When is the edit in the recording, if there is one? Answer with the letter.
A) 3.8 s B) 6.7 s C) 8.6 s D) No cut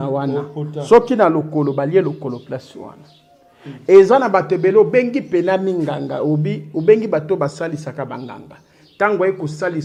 D